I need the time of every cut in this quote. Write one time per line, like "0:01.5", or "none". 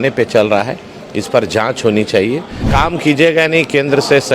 0:02.6

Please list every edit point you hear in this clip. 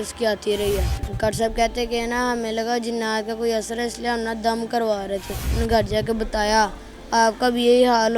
0:01.0
0:05.5

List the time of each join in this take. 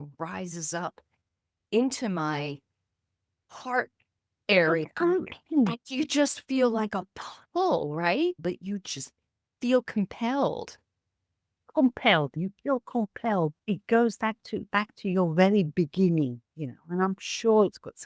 0:13.6

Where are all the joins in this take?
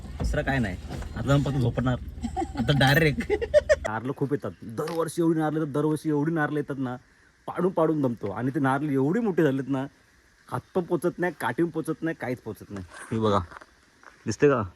0:03.8

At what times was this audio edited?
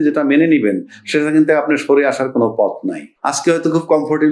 0:03.1

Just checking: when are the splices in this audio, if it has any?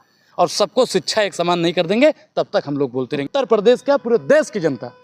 0:03.2

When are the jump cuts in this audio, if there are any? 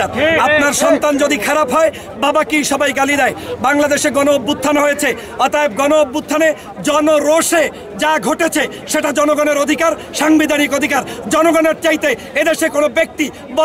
none

